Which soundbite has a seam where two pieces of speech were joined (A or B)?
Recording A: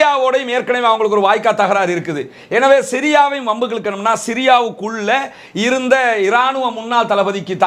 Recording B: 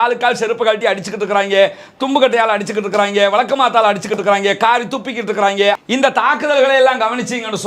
B